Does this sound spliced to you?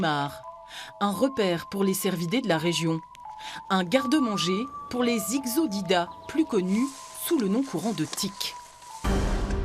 no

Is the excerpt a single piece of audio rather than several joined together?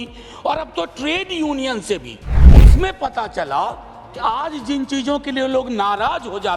no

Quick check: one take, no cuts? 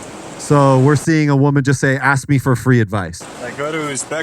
no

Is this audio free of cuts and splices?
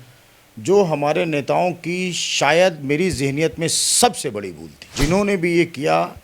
no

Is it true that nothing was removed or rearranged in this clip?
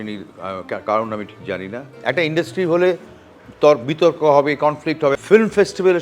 no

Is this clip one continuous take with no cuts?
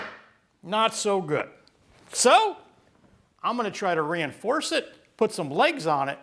yes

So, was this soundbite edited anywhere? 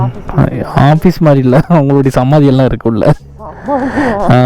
no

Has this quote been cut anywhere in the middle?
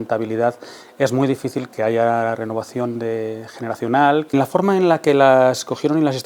yes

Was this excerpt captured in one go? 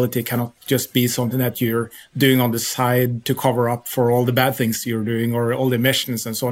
yes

